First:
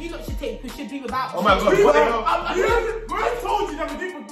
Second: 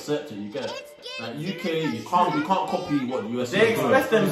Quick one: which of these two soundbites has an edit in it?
second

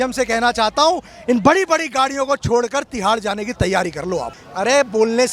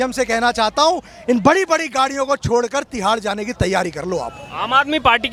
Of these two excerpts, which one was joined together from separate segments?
first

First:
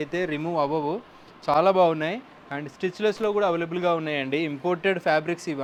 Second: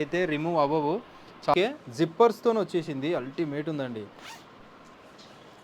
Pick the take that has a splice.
second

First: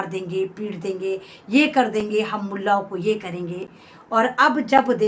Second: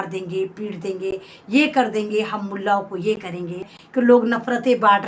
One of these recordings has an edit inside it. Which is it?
second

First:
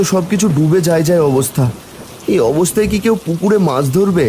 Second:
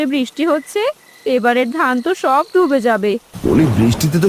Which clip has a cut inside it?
second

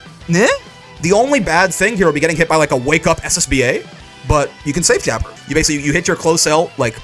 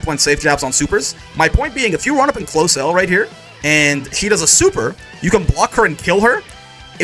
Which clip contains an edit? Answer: first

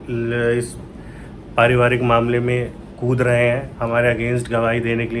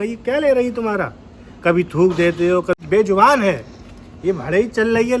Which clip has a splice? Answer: second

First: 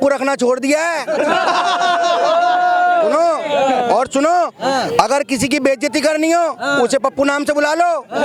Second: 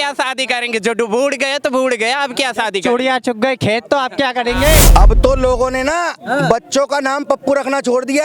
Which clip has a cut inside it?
second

